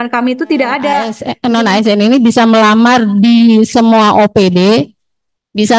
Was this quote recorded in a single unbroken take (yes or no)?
no